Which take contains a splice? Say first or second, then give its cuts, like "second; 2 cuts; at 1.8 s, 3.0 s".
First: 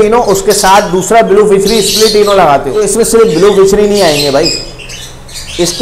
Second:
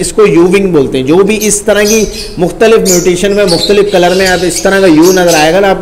first; 1 cut; at 2.7 s